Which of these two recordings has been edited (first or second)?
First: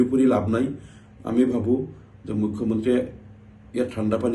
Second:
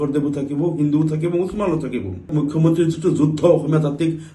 second